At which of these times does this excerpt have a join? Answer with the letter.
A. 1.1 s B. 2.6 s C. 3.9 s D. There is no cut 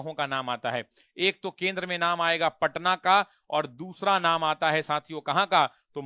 D